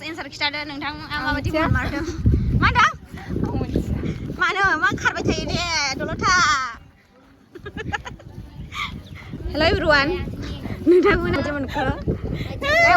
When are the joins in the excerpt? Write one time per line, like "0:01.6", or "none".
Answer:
0:09.4
0:11.4